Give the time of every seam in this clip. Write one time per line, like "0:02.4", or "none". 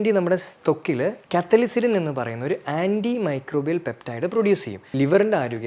0:04.8